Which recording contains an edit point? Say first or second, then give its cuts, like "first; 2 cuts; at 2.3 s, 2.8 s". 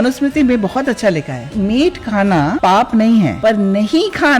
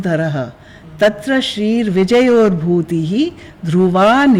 first; 3 cuts; at 1.5 s, 2.6 s, 3.3 s